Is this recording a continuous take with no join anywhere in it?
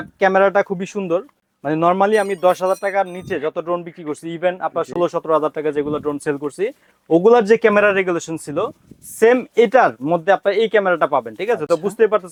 yes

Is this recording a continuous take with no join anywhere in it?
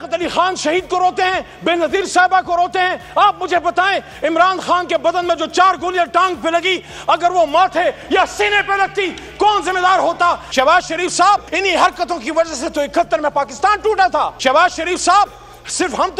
no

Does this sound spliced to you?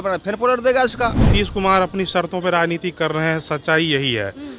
yes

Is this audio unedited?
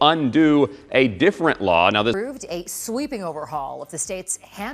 no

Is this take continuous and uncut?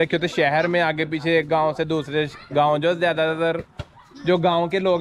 yes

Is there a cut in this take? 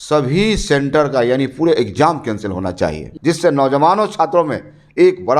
yes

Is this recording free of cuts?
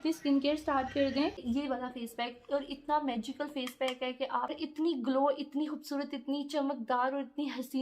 no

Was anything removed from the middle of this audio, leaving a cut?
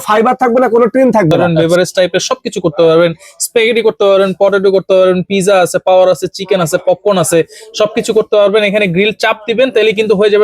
yes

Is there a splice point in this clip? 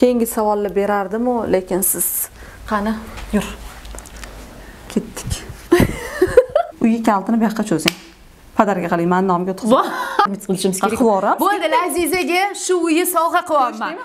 yes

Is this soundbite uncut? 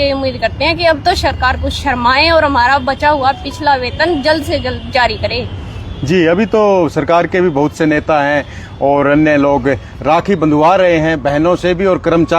yes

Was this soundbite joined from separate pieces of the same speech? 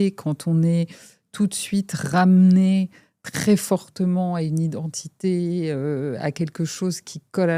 no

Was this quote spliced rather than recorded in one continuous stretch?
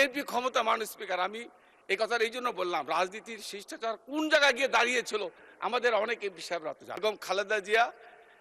yes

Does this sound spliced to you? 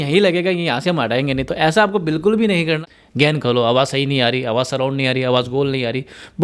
yes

